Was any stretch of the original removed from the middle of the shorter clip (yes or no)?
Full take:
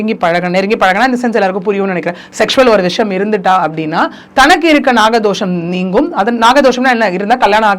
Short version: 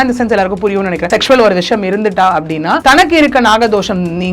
yes